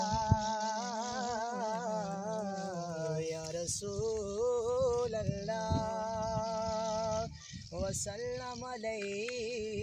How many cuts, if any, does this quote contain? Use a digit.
0